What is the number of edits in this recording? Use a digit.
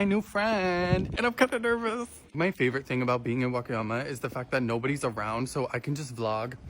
1